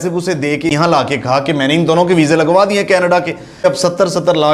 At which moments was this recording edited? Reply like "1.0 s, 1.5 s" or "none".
0.7 s, 3.6 s